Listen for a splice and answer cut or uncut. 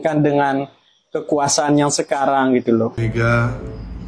cut